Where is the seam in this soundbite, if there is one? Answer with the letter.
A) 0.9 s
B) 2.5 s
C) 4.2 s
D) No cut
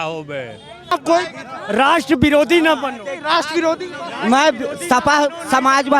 A